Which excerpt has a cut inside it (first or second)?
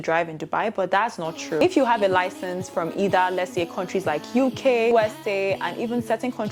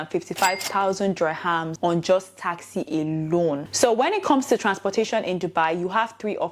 second